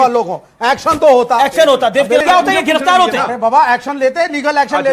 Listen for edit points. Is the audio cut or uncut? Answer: cut